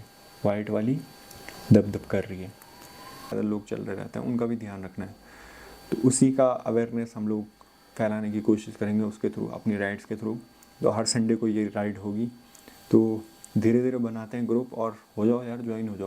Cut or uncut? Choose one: cut